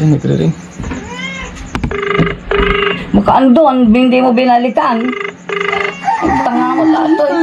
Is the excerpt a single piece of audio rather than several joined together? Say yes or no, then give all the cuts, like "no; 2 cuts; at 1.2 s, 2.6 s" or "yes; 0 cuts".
yes; 0 cuts